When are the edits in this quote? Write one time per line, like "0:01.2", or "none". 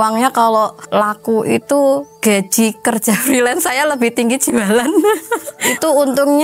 0:02.1